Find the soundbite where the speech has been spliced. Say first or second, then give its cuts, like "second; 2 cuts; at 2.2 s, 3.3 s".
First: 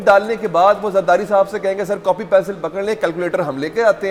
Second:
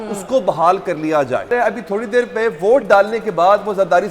second; 1 cut; at 1.5 s